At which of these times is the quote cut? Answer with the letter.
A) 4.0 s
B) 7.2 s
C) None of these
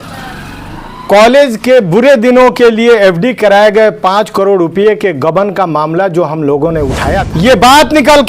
B